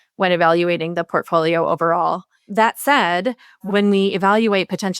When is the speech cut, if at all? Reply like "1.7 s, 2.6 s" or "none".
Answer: 2.3 s, 3.6 s